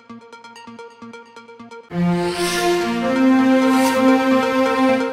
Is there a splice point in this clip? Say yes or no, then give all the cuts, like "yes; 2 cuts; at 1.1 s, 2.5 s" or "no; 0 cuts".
no; 0 cuts